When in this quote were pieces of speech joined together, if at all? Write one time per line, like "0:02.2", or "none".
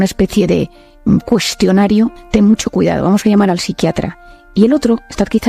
0:02.2